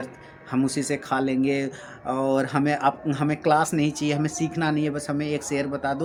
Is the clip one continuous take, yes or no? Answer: yes